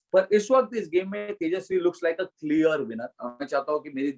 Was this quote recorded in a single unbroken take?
yes; 0 cuts

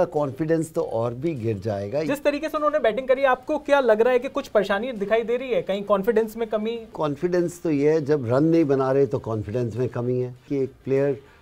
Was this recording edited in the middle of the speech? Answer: yes; 3 cuts; at 2.1 s, 6.9 s, 10.4 s

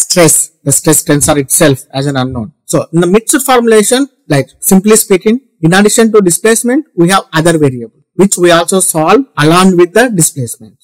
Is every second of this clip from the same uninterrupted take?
yes; 0 cuts

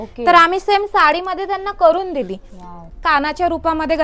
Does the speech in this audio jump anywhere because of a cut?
yes; 1 cut; at 2.9 s

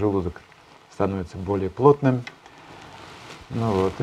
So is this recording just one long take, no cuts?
yes; 0 cuts

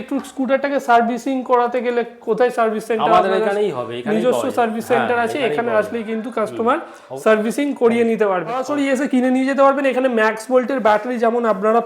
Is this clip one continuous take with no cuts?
no; 1 cut; at 8.7 s

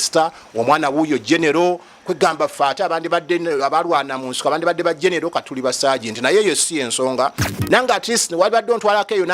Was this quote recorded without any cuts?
no; 1 cut; at 7.5 s

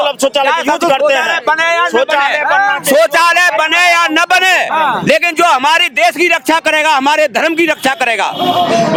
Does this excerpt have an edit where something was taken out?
no; 0 cuts

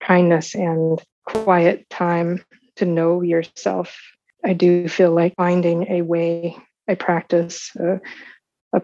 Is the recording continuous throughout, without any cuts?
no; 3 cuts; at 1.4 s, 4.2 s, 5.3 s

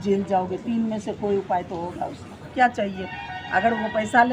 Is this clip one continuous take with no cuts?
no; 1 cut; at 2.5 s

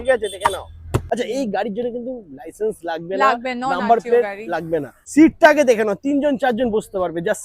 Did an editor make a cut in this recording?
yes; 2 cuts; at 1.0 s, 5.0 s

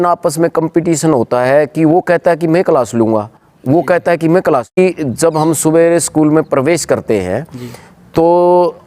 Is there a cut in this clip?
yes; 1 cut; at 4.8 s

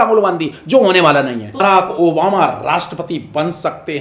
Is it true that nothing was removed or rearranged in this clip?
no; 1 cut; at 1.6 s

